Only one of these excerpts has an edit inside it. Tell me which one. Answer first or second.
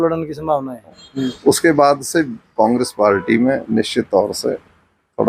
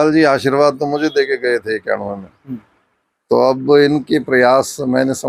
first